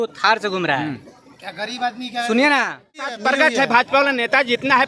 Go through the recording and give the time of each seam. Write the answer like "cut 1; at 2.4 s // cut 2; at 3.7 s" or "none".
cut 1; at 3.2 s